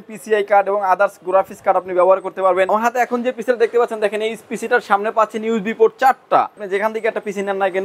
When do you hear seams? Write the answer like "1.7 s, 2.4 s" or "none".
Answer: 2.7 s, 6.7 s